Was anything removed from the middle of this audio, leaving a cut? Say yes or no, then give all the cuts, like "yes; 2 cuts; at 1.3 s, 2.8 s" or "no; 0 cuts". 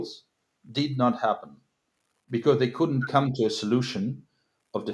no; 0 cuts